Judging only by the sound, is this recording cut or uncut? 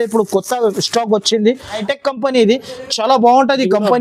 cut